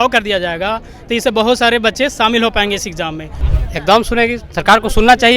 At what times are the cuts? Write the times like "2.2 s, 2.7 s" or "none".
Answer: 3.3 s